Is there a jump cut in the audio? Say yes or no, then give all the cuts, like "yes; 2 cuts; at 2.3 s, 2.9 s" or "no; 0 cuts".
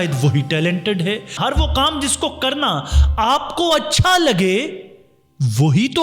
yes; 1 cut; at 1.3 s